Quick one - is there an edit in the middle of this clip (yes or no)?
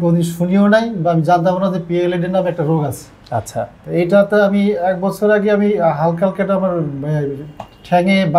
no